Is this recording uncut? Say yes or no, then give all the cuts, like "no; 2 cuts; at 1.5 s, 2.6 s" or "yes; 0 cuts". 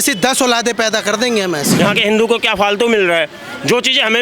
no; 1 cut; at 1.8 s